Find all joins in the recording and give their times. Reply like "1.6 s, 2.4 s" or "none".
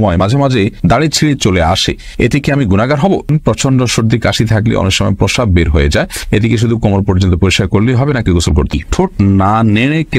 3.3 s, 8.7 s